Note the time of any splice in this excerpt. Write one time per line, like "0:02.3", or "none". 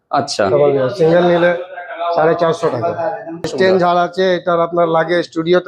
0:03.5